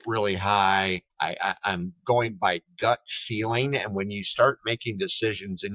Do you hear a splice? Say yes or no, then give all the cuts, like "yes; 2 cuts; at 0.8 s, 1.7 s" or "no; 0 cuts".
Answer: yes; 1 cut; at 1.1 s